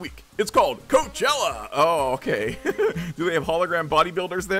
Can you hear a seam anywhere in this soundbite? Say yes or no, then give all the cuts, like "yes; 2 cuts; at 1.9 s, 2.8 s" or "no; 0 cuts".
no; 0 cuts